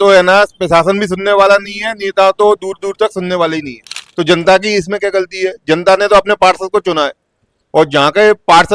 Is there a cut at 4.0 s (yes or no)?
yes